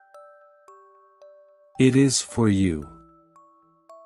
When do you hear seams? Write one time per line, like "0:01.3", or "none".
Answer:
0:01.6
0:02.9